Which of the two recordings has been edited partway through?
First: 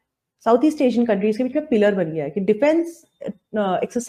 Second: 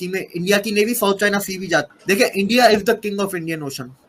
second; 1 cut; at 1.9 s

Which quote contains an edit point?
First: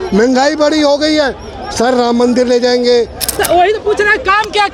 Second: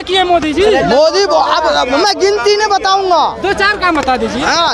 first; 1 cut; at 3.3 s

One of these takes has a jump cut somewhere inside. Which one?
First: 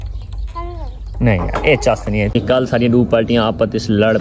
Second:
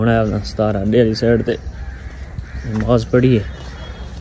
first; 1 cut; at 2.3 s

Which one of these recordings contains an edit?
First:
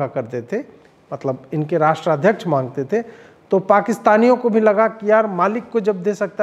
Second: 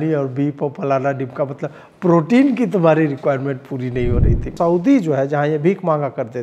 second; 1 cut; at 4.4 s

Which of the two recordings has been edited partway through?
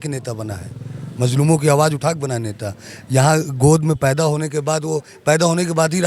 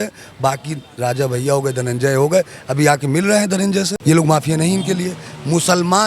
second; 1 cut; at 3.9 s

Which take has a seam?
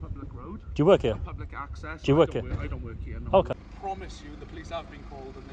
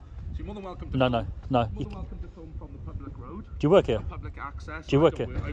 first; 1 cut; at 3.6 s

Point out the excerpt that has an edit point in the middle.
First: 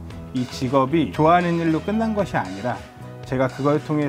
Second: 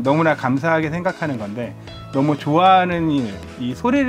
first; 1 cut; at 1.1 s

